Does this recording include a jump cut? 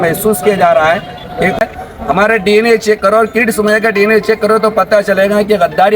yes; 1 cut; at 1.6 s

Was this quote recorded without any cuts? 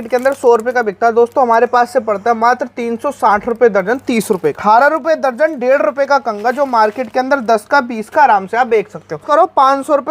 no; 2 cuts; at 4.6 s, 9.2 s

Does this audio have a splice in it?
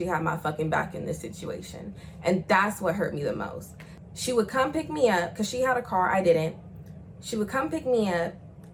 no; 0 cuts

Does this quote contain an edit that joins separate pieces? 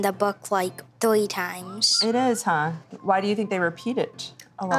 yes; 1 cut; at 2.9 s

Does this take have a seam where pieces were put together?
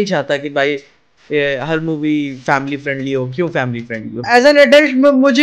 yes; 1 cut; at 4.2 s

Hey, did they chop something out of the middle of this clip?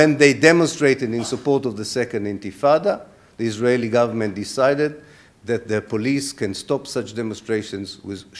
no; 0 cuts

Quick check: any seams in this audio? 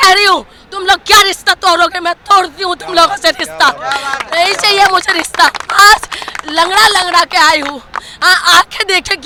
no; 0 cuts

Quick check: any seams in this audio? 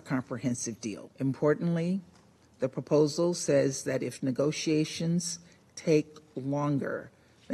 yes; 1 cut; at 1.1 s

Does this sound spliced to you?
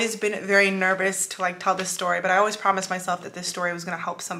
no; 0 cuts

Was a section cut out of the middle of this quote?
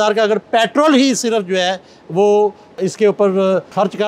no; 0 cuts

